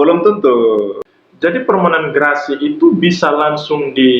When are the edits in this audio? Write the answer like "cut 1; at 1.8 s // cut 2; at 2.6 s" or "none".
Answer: cut 1; at 1.0 s